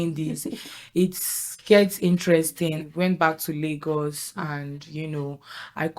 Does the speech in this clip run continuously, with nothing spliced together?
no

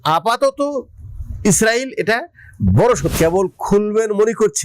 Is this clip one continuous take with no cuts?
no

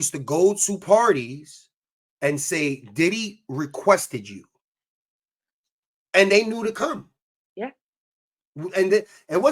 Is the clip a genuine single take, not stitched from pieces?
yes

